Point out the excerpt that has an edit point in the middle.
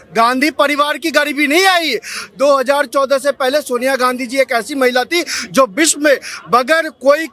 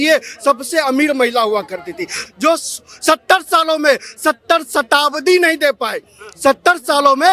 second; 1 cut; at 2.2 s

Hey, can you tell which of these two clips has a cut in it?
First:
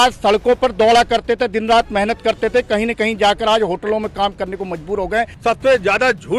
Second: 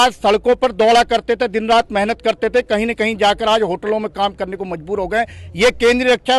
first; 1 cut; at 5.3 s

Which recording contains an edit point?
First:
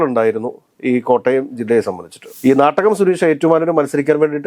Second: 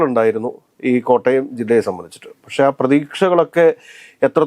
first; 1 cut; at 2.3 s

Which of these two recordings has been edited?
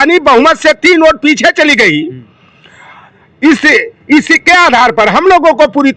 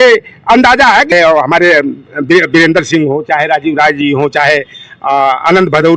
second; 1 cut; at 1.1 s

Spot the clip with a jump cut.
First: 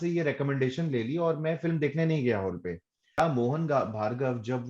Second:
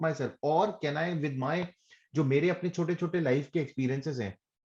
first; 1 cut; at 3.2 s

